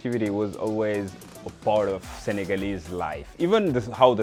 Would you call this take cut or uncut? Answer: uncut